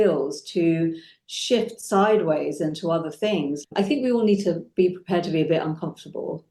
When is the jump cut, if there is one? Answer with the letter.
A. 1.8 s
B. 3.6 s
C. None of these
B